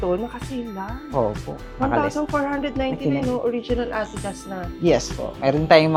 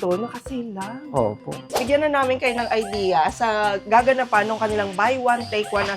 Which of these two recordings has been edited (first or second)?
second